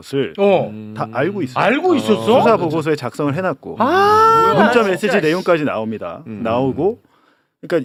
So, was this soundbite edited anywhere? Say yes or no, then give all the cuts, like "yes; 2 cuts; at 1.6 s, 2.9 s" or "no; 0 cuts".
no; 0 cuts